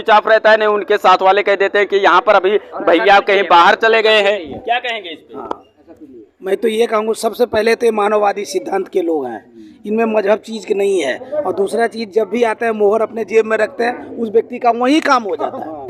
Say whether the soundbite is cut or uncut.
uncut